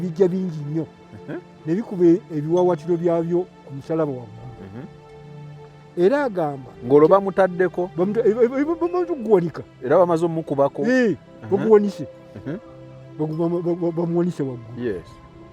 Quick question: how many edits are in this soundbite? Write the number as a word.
zero